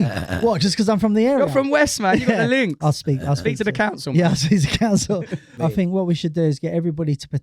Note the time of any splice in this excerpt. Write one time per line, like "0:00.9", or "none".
0:05.5